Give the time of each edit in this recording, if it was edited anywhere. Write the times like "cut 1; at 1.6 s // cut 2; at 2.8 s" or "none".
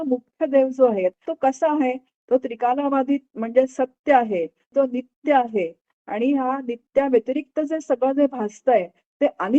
cut 1; at 1.2 s // cut 2; at 4.7 s